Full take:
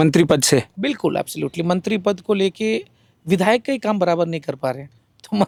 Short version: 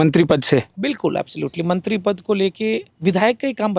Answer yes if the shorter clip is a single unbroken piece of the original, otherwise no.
no